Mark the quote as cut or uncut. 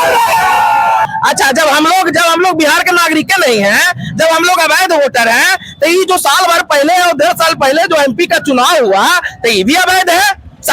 cut